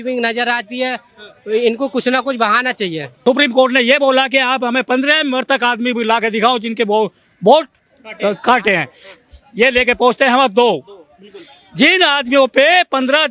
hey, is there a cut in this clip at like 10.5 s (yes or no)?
no